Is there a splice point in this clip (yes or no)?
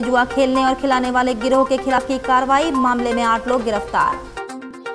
no